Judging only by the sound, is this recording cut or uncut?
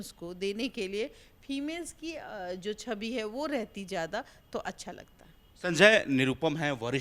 uncut